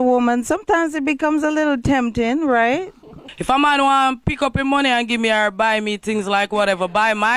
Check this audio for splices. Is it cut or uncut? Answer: uncut